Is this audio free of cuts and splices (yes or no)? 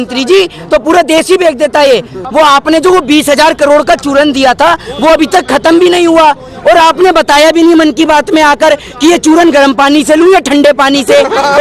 no